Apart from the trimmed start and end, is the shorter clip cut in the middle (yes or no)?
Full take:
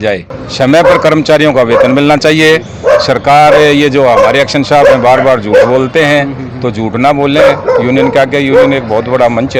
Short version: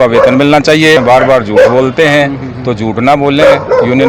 yes